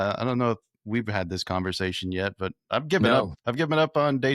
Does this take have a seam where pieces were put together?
yes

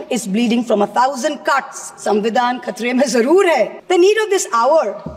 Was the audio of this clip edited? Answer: yes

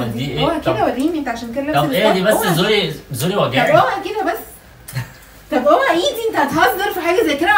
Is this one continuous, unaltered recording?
yes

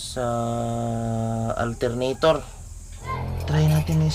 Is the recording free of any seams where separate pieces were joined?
no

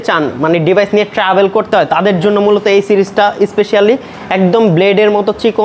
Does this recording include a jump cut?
no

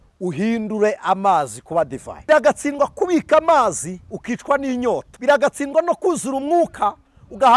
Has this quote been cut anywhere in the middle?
yes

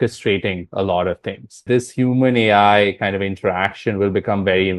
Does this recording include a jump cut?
yes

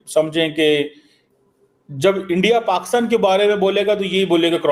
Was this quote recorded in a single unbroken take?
yes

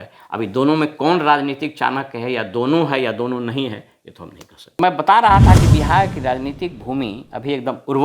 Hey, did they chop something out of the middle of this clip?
yes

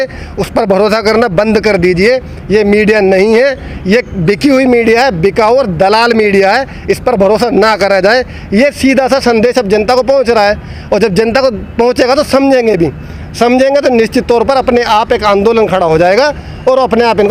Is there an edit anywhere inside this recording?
no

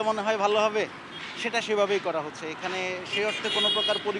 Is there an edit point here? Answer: no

